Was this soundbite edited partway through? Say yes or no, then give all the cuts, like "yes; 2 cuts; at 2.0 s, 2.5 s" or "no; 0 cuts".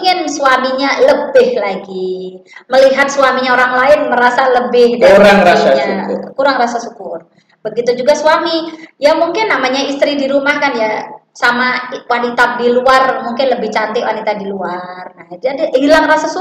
no; 0 cuts